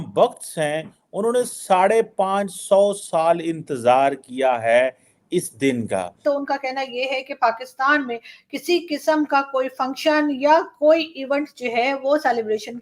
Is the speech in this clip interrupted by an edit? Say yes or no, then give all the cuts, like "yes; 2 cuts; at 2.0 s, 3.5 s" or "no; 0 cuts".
yes; 1 cut; at 6.2 s